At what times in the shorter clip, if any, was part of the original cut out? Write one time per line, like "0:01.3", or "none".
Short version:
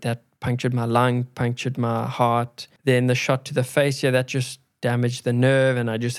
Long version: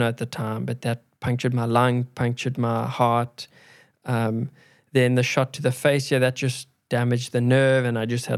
0:02.6